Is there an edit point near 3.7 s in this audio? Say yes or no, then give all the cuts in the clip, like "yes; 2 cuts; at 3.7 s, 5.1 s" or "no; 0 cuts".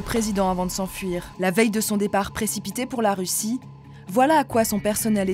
no; 1 cut; at 1.3 s